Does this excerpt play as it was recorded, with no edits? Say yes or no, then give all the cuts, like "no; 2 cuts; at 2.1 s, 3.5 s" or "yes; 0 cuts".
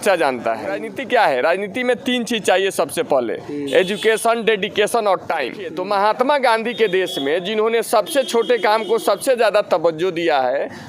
no; 2 cuts; at 0.9 s, 5.7 s